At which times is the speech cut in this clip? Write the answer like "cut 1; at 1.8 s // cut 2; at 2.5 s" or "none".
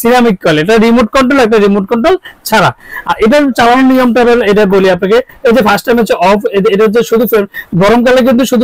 none